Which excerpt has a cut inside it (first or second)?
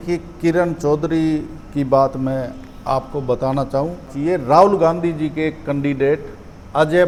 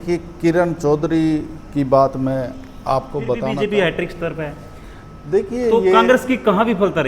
second